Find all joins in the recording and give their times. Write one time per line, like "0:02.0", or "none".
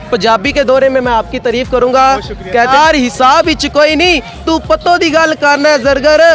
0:02.7